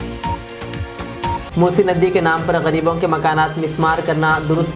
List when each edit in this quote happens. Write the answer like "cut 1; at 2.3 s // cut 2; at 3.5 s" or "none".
cut 1; at 1.4 s